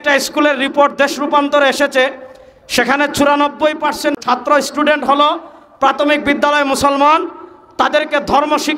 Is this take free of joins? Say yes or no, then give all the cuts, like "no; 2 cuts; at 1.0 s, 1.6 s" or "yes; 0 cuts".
no; 1 cut; at 4.2 s